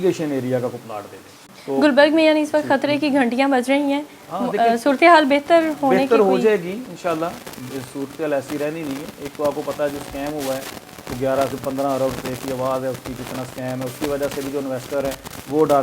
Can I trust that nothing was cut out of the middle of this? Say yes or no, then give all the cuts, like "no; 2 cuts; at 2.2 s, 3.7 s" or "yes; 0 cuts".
no; 1 cut; at 1.6 s